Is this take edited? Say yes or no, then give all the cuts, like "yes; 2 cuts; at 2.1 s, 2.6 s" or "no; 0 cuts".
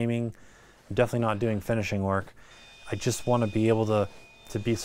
yes; 1 cut; at 2.8 s